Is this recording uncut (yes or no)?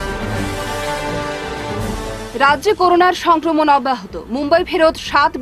yes